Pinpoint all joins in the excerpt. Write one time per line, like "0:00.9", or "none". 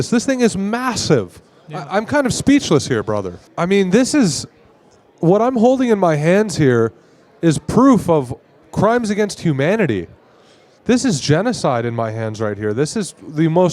0:03.5